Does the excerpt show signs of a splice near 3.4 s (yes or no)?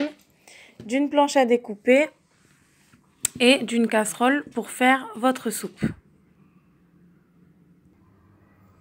no